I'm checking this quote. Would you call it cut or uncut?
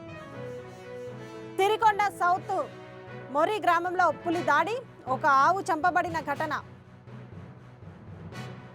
cut